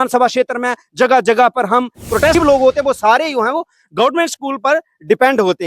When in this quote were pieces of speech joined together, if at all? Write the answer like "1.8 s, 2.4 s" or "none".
2.3 s